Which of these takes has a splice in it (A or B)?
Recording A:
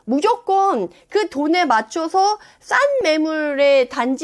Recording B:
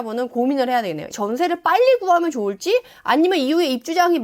B